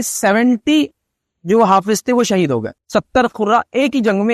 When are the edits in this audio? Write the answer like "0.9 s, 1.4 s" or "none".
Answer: 2.8 s